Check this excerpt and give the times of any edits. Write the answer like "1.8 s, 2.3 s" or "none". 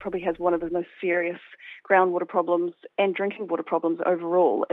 none

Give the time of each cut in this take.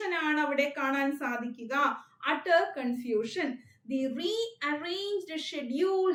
none

